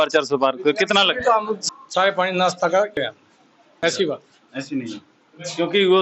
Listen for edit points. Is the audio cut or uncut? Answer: cut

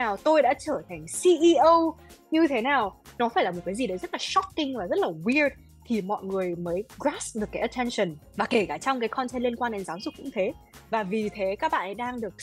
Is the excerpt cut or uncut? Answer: uncut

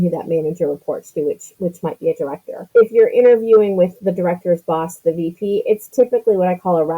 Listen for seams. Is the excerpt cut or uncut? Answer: cut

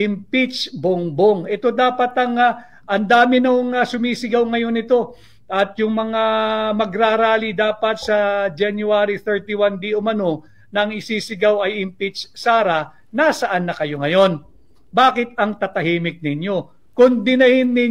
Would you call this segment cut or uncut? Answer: cut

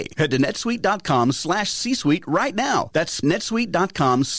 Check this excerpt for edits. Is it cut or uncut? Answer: cut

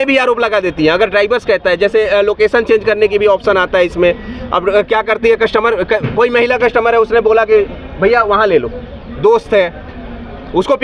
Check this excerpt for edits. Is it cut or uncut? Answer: uncut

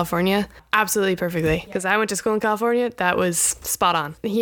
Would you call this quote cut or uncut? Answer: uncut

